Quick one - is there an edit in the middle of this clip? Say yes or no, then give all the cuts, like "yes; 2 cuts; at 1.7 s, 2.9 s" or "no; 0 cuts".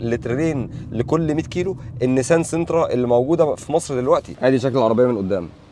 yes; 1 cut; at 4.3 s